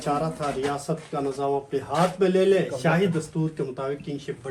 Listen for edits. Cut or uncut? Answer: uncut